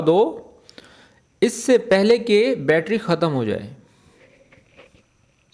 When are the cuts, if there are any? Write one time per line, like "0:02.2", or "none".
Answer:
none